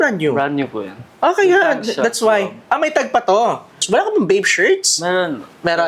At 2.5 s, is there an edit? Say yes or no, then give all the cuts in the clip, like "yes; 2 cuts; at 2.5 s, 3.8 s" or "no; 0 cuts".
no; 1 cut; at 3.8 s